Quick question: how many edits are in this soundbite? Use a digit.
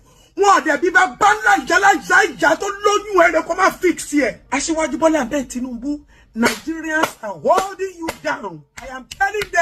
1